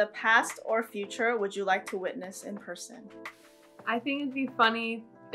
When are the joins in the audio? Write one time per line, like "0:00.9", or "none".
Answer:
none